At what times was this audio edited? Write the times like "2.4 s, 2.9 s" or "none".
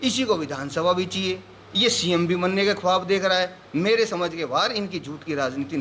none